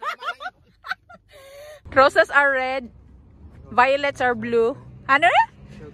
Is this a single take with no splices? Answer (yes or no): no